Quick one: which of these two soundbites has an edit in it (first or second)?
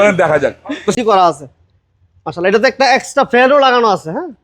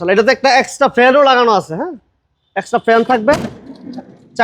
first